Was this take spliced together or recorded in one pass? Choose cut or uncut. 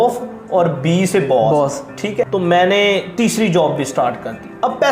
cut